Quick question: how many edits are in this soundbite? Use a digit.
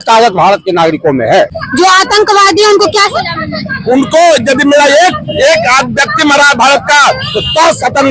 1